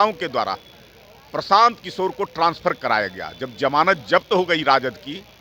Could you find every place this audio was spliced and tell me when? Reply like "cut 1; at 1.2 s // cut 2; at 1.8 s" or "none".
none

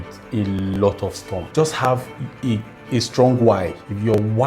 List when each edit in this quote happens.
cut 1; at 1.4 s // cut 2; at 2.8 s

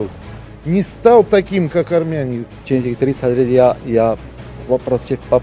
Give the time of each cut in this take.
cut 1; at 2.5 s

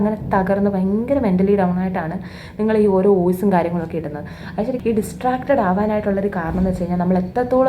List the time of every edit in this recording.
cut 1; at 4.8 s

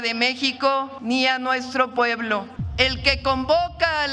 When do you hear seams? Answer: cut 1; at 0.9 s // cut 2; at 2.6 s

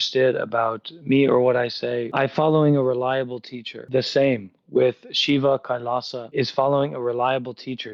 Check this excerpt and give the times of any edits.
cut 1; at 2.1 s // cut 2; at 3.8 s // cut 3; at 6.2 s

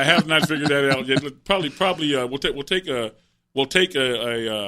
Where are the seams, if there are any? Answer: none

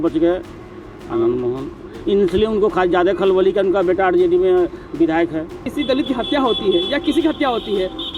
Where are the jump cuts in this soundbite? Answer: cut 1; at 5.6 s

